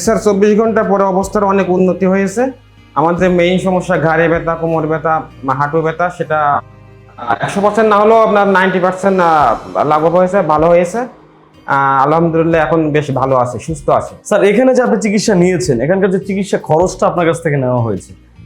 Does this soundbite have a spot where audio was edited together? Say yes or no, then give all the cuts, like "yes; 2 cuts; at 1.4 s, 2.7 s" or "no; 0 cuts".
yes; 1 cut; at 14.1 s